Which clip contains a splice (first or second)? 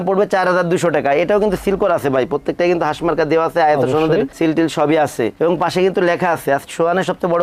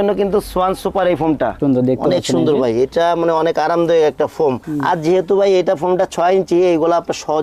second